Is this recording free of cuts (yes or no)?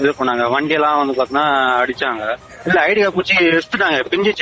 yes